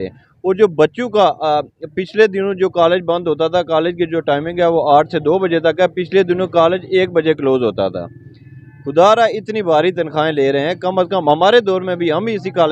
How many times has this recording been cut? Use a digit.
0